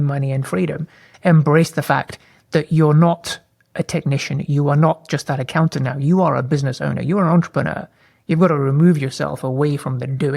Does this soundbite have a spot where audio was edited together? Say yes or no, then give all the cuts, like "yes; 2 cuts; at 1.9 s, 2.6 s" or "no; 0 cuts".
yes; 1 cut; at 1.1 s